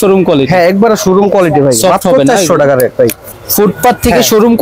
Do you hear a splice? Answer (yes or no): yes